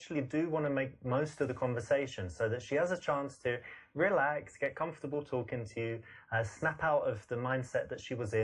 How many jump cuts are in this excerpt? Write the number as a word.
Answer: one